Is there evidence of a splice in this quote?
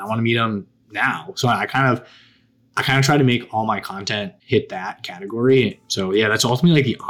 yes; 2 cuts; at 4.4 s, 5.8 s

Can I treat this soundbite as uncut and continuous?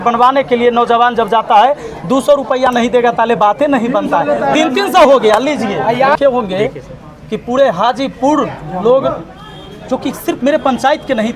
no; 1 cut; at 6.2 s

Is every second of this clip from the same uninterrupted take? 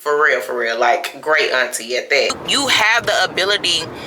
no; 1 cut; at 2.4 s

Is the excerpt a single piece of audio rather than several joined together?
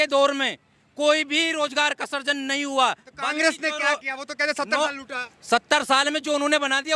yes; 0 cuts

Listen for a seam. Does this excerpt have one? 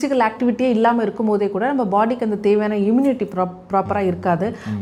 no; 0 cuts

